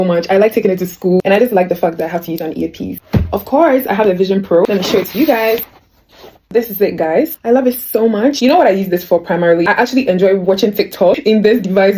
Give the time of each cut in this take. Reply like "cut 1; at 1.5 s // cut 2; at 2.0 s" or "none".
none